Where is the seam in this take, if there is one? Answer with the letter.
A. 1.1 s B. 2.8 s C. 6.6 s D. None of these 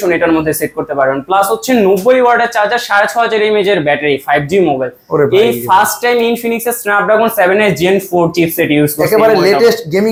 D